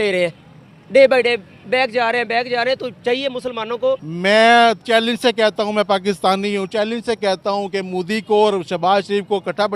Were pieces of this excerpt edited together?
yes; 1 cut; at 4.1 s

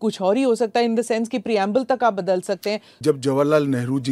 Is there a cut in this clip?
yes; 1 cut; at 2.9 s

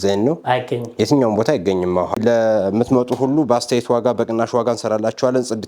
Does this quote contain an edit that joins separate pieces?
yes; 1 cut; at 2.1 s

